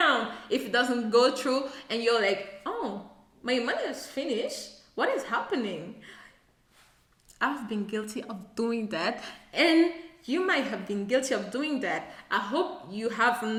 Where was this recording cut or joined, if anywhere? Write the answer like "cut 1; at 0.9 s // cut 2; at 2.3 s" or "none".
none